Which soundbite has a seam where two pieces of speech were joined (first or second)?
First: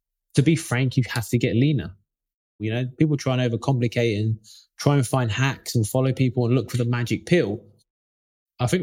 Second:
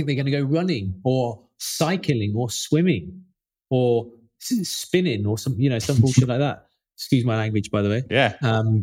first